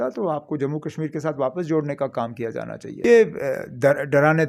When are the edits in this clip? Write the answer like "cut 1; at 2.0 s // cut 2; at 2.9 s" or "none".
cut 1; at 2.9 s